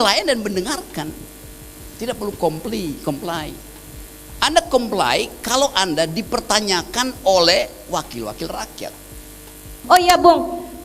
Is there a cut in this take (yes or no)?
yes